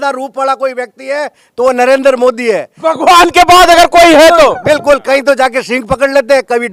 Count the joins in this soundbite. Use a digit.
0